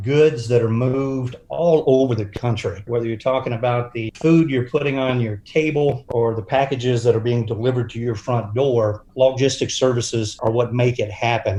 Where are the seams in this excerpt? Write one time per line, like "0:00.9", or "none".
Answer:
none